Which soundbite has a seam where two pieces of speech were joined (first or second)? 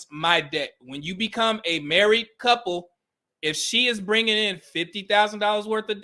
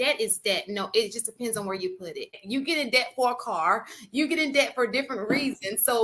second